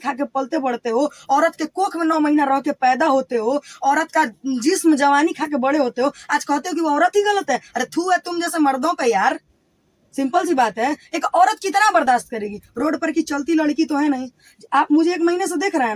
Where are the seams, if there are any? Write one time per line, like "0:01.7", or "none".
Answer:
none